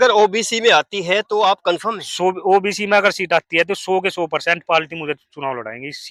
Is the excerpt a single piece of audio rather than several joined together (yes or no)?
yes